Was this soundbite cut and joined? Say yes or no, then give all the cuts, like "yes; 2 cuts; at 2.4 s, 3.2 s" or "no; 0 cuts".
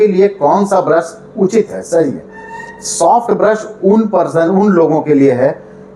no; 0 cuts